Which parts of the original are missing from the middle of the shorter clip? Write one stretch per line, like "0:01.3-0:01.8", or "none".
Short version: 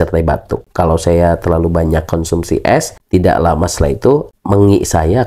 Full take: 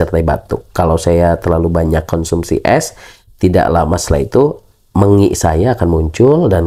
0:03.0-0:03.3
0:04.7-0:04.9